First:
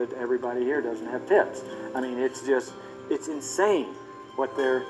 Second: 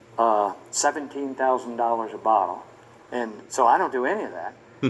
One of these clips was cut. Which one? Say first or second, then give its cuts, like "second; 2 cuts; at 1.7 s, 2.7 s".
second; 1 cut; at 2.1 s